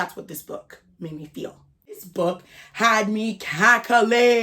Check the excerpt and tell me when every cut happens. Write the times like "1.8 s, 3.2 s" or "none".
2.0 s